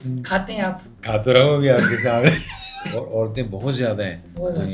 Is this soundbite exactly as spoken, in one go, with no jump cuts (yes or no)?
no